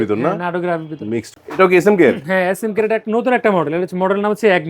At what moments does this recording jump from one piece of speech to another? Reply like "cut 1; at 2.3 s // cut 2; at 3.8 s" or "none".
cut 1; at 1.3 s